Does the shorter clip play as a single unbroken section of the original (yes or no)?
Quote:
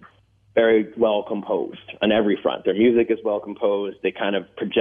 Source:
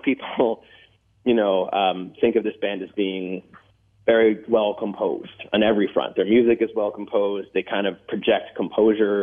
yes